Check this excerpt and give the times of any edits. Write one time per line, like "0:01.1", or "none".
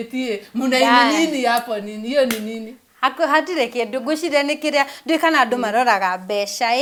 none